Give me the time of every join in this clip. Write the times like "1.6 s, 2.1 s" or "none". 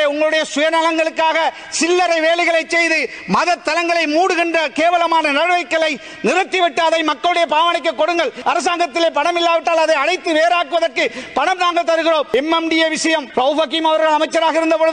8.4 s, 12.3 s, 13.3 s

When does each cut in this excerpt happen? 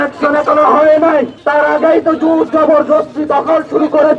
1.4 s

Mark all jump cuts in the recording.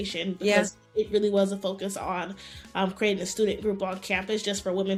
none

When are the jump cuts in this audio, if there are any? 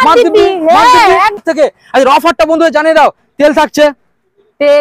1.4 s

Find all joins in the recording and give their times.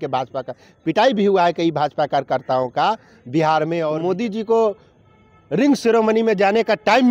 3.9 s

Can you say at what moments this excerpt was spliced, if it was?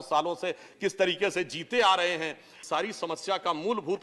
2.5 s

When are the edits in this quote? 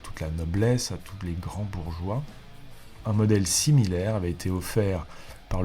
3.0 s

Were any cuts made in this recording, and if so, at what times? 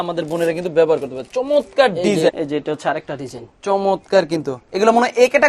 2.3 s

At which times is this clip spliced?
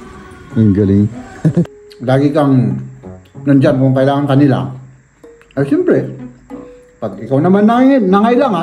1.8 s

